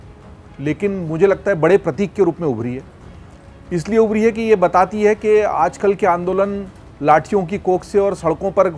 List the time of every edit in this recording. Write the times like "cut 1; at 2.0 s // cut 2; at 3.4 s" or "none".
none